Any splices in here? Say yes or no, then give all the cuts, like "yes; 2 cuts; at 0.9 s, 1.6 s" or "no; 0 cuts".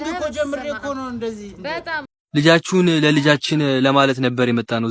yes; 1 cut; at 2.2 s